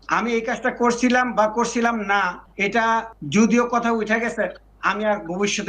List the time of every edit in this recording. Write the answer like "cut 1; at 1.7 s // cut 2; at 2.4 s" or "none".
cut 1; at 3.2 s